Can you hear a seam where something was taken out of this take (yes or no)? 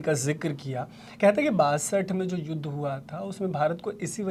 no